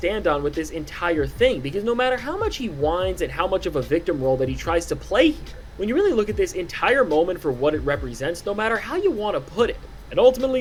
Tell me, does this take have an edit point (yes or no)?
no